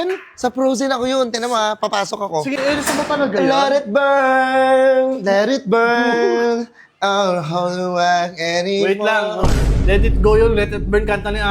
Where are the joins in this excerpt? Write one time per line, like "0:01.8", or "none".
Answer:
0:02.6